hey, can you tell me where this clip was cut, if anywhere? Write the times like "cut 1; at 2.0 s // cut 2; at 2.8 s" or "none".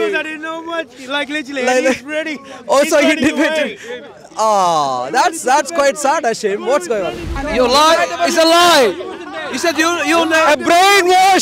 cut 1; at 7.3 s